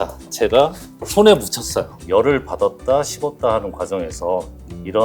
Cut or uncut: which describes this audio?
cut